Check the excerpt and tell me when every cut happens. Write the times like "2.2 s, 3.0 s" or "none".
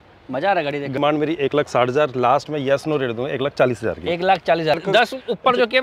1.0 s, 4.8 s